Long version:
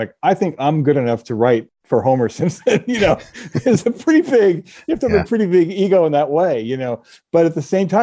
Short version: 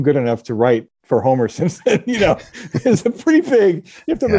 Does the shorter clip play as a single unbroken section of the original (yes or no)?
yes